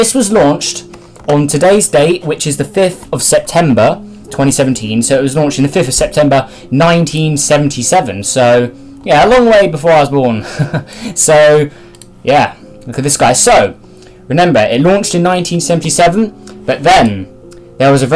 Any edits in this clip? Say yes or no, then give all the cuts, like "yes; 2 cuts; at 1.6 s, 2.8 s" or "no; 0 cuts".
yes; 1 cut; at 6.6 s